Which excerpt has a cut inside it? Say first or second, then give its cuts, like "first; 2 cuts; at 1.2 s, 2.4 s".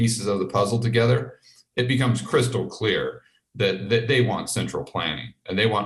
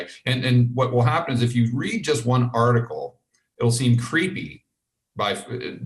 second; 1 cut; at 3.4 s